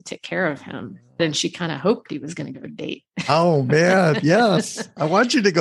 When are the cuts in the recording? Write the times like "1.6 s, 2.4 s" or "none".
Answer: 1.2 s